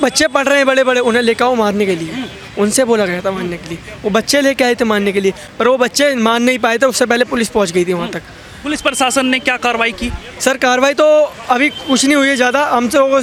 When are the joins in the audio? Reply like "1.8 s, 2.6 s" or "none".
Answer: none